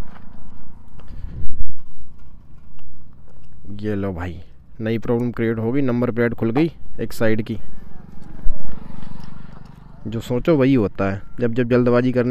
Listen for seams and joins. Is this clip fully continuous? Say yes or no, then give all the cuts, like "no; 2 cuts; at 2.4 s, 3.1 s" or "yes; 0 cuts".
yes; 0 cuts